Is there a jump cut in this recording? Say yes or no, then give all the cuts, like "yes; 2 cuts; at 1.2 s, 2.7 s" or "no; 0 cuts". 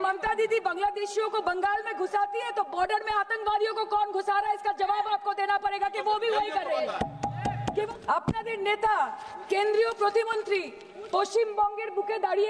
yes; 1 cut; at 7.9 s